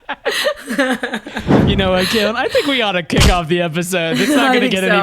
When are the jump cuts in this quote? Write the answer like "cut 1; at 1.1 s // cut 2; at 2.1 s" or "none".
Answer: cut 1; at 1.5 s